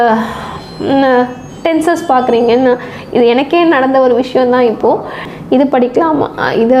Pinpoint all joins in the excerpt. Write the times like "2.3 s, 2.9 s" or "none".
5.3 s